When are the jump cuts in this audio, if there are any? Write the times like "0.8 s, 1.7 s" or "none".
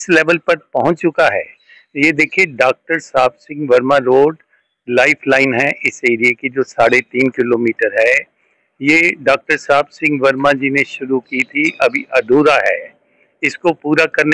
none